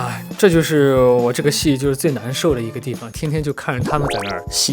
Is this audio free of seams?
no; 1 cut; at 3.1 s

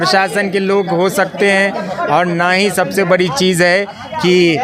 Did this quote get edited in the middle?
no; 0 cuts

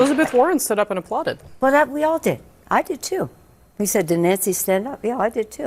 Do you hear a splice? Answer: yes; 1 cut; at 1.4 s

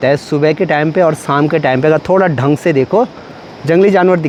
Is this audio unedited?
yes; 0 cuts

